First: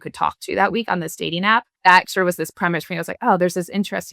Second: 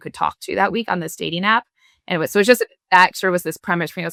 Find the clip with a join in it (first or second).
first